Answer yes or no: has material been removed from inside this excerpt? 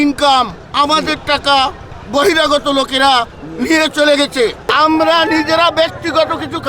yes